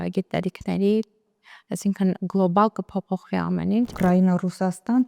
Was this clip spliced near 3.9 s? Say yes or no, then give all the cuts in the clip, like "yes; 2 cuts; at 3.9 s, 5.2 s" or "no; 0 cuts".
yes; 1 cut; at 3.9 s